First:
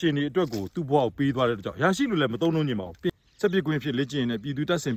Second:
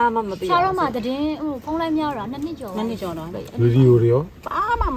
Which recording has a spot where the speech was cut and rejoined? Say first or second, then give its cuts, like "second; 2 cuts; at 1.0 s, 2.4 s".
first; 1 cut; at 3.1 s